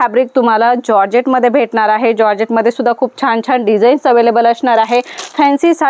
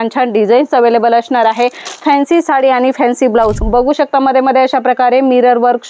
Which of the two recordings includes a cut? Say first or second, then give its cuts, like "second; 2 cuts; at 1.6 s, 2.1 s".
second; 1 cut; at 3.6 s